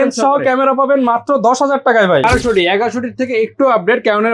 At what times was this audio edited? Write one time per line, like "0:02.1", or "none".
0:02.3